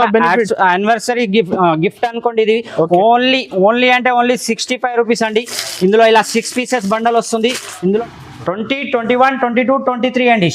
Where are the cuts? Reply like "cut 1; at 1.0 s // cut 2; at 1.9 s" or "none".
cut 1; at 7.9 s